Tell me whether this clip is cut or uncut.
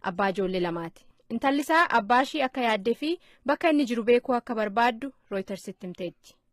cut